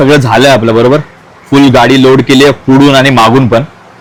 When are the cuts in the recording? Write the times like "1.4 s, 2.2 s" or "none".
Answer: none